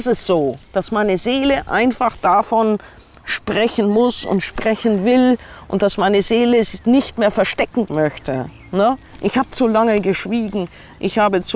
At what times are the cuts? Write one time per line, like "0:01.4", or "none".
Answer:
none